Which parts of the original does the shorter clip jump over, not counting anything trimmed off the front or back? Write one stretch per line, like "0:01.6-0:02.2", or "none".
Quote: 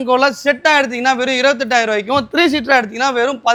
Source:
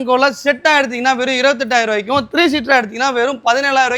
none